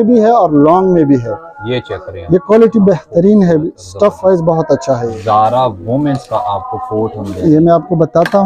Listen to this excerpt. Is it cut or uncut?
cut